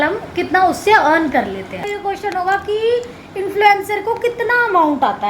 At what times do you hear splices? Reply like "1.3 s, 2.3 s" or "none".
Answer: 1.9 s